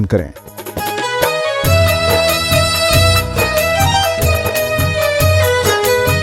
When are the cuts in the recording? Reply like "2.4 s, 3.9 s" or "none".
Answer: 4.3 s